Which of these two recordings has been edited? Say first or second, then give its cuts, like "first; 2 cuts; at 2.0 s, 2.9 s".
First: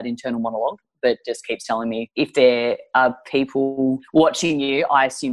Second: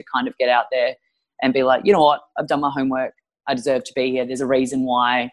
first; 2 cuts; at 2.0 s, 4.0 s